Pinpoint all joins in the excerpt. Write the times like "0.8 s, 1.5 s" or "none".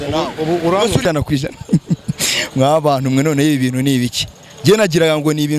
1.0 s